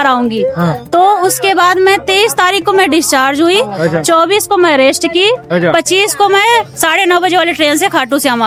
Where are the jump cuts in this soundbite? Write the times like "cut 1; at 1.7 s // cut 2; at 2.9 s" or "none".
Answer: none